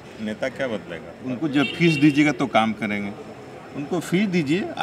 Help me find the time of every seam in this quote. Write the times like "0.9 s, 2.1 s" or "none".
1.1 s